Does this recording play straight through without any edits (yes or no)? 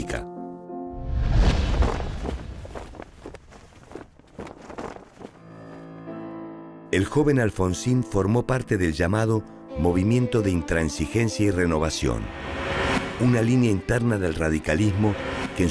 yes